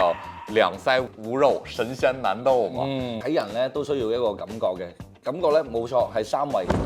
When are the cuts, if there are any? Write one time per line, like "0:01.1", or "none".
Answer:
0:01.2
0:03.2